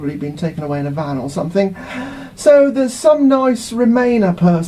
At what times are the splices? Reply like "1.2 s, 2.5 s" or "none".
3.2 s